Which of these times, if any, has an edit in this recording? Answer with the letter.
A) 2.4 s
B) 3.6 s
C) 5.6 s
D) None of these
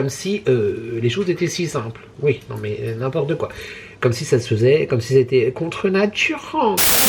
D